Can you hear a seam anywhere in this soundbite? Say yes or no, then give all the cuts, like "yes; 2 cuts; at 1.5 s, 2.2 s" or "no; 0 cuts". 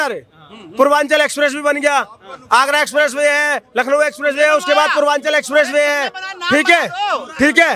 no; 0 cuts